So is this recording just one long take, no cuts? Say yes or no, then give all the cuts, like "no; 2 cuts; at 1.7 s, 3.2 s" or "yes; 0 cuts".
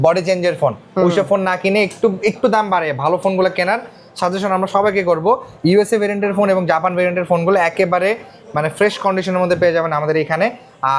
yes; 0 cuts